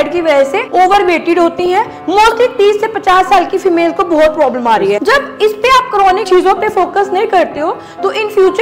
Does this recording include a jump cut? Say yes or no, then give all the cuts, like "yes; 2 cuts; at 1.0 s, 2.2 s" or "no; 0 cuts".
yes; 2 cuts; at 5.0 s, 6.3 s